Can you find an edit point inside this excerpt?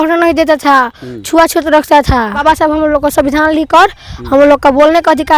yes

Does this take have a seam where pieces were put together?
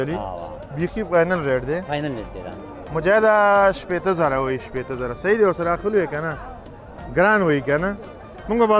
no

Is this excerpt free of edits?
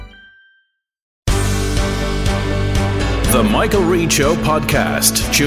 no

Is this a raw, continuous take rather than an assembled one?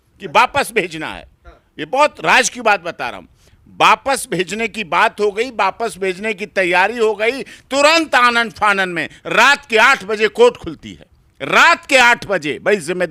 yes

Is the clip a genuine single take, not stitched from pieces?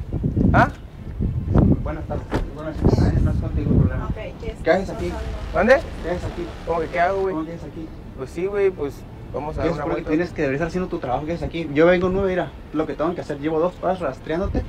yes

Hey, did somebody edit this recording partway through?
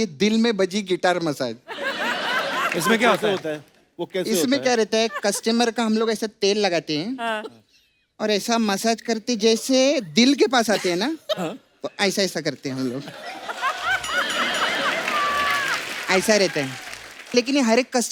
no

